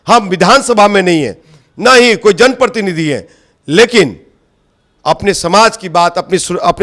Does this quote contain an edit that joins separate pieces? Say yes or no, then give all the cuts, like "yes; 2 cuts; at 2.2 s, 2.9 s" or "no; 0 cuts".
no; 0 cuts